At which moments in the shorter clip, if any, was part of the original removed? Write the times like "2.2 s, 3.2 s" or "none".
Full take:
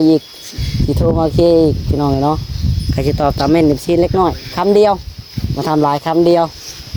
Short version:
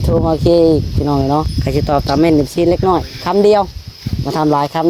1.6 s